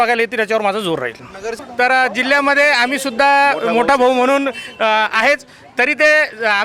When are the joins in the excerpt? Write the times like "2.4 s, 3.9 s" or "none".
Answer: 1.5 s